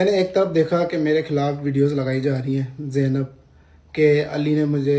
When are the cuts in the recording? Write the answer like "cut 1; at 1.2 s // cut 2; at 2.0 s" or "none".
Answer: none